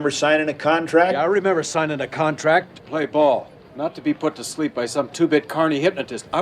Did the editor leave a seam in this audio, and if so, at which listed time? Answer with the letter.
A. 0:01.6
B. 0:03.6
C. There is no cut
B